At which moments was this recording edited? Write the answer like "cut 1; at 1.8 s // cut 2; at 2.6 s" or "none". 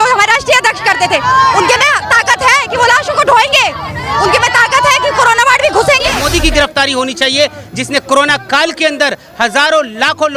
cut 1; at 6.2 s